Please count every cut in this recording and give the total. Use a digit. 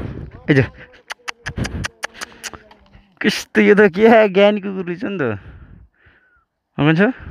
0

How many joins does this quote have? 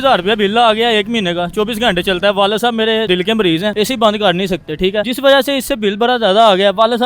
2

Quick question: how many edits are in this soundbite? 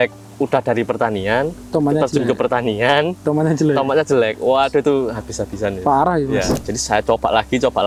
1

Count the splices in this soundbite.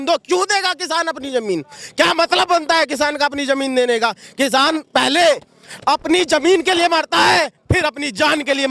0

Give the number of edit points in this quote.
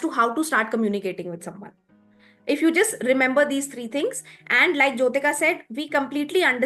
0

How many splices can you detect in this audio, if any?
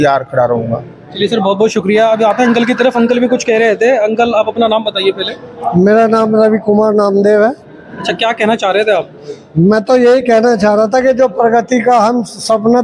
0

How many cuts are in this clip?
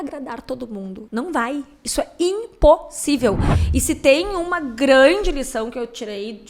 1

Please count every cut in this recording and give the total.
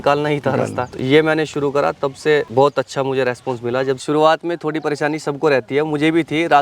2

